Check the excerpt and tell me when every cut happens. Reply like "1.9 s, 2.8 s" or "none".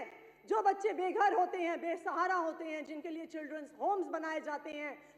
none

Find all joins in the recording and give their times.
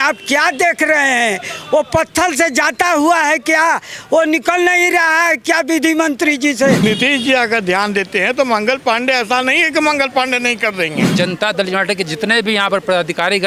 6.8 s, 11.0 s

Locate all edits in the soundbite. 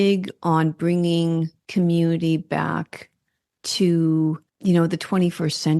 1.6 s, 4.5 s

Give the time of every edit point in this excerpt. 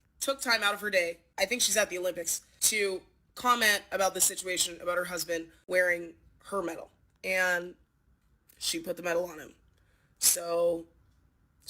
7.1 s

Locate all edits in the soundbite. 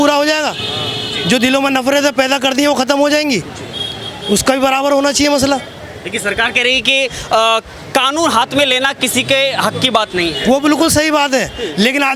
none

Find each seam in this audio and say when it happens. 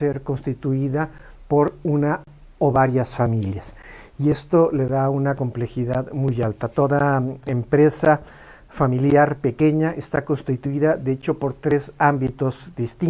none

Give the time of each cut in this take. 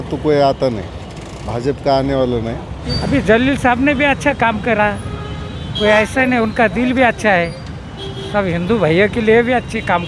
2.8 s

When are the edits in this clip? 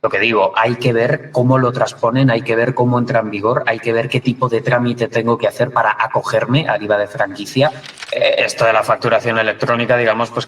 7.9 s

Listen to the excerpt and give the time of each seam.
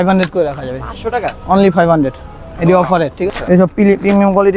3.3 s

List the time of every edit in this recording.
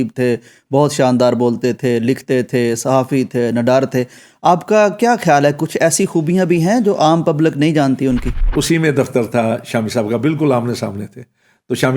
8.5 s

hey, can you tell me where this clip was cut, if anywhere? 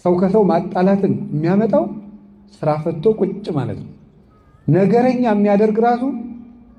none

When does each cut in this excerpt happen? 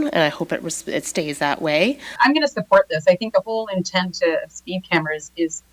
2.1 s

